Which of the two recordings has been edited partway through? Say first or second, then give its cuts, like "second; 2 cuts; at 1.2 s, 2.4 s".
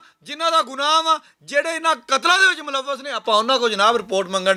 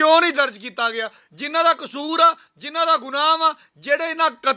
second; 1 cut; at 1.2 s